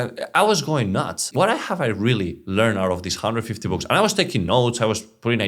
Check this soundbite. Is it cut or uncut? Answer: cut